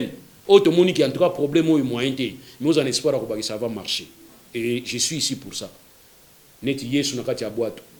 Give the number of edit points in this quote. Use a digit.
0